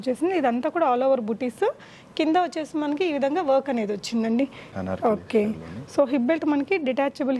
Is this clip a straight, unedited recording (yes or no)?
no